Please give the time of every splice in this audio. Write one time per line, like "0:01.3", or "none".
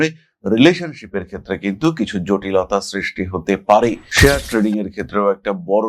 0:04.1